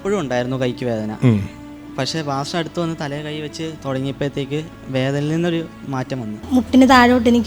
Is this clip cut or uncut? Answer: cut